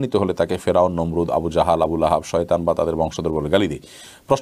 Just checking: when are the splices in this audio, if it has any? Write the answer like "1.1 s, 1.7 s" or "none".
none